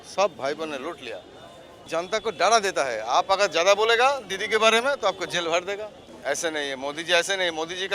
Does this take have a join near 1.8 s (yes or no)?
yes